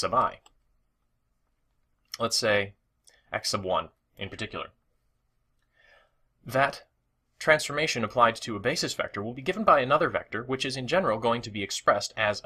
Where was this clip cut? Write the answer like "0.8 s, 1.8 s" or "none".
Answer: none